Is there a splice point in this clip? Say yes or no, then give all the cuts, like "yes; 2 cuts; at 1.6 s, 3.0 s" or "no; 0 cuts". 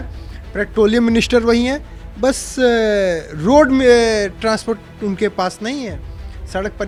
no; 0 cuts